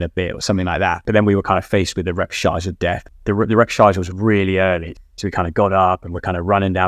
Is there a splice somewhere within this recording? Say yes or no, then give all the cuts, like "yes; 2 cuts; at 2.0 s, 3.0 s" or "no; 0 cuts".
yes; 3 cuts; at 1.0 s, 3.0 s, 4.9 s